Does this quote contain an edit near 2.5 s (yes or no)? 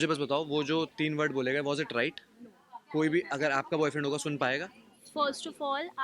no